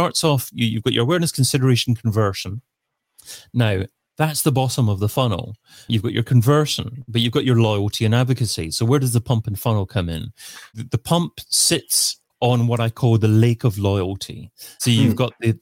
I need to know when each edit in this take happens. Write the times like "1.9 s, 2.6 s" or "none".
none